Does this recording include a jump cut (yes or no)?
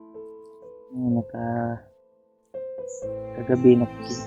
yes